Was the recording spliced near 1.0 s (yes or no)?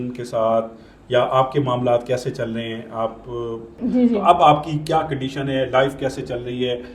no